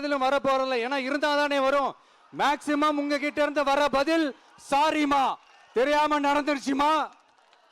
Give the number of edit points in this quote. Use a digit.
1